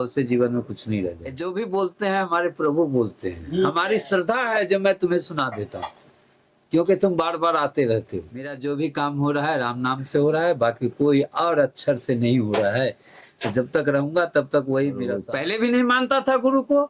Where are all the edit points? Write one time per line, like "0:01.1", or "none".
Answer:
0:01.4
0:08.5
0:15.2